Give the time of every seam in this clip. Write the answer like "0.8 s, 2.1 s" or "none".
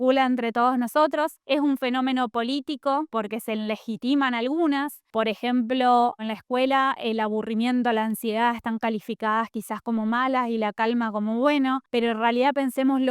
1.4 s, 3.1 s, 5.0 s, 6.3 s